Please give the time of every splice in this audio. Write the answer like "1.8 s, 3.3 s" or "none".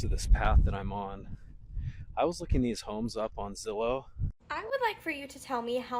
4.4 s